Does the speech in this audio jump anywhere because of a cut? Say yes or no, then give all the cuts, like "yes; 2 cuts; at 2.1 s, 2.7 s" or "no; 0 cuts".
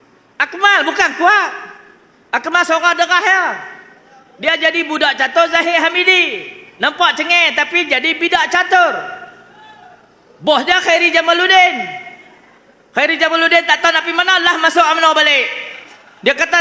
no; 0 cuts